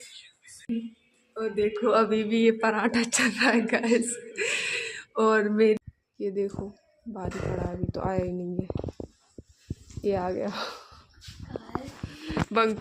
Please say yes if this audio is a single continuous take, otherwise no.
no